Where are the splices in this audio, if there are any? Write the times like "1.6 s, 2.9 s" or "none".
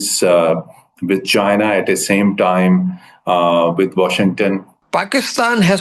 4.7 s